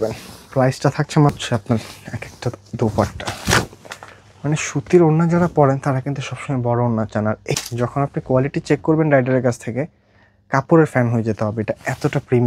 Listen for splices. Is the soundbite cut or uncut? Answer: cut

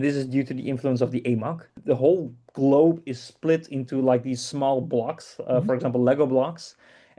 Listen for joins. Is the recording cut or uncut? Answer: cut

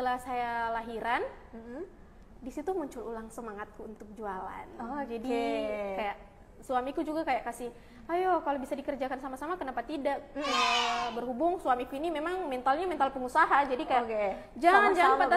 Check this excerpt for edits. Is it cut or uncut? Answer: uncut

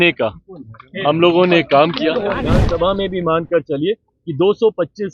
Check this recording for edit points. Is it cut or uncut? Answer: cut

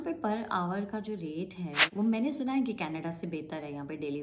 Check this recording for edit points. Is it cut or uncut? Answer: cut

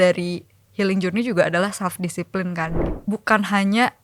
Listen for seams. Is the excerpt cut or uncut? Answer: cut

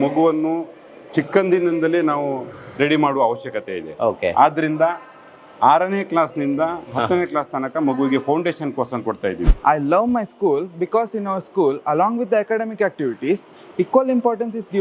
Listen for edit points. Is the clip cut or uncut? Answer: cut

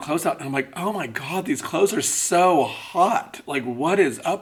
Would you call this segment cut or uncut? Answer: uncut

